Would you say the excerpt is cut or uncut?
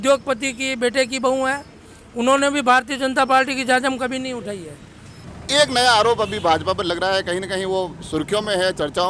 cut